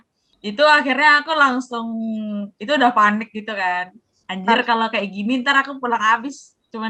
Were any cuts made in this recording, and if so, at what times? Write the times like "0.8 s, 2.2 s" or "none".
none